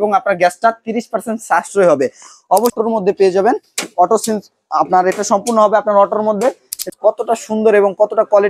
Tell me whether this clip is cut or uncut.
cut